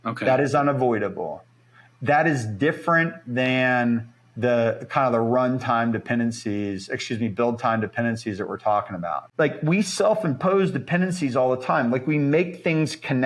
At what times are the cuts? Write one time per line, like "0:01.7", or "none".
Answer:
0:09.2